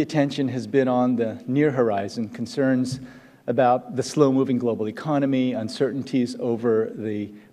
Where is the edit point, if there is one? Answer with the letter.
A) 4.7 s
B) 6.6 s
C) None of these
B